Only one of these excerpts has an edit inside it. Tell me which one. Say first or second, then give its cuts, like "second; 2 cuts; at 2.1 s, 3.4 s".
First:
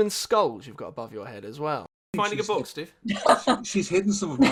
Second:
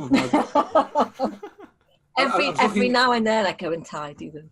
first; 1 cut; at 1.9 s